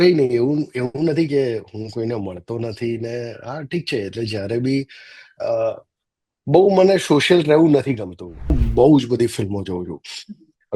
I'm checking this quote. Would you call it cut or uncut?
cut